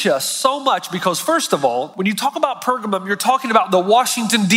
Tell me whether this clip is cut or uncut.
cut